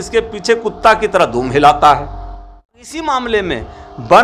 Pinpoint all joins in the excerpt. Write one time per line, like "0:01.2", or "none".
0:02.8